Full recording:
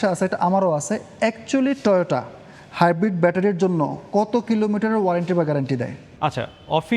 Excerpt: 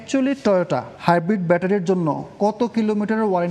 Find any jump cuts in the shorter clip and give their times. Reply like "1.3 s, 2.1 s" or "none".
0.9 s

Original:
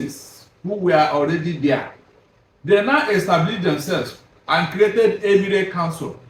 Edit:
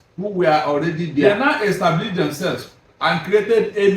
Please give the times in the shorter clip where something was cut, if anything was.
1.2 s

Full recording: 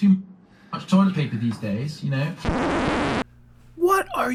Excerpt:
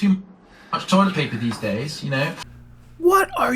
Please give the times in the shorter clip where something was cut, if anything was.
2.5 s

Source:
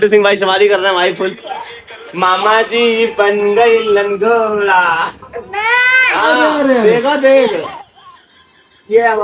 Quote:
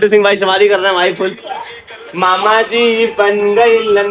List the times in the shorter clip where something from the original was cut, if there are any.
none

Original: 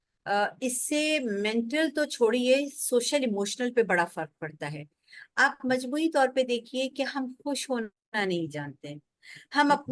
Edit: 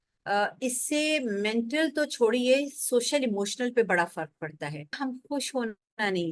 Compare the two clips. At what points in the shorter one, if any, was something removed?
5.0 s

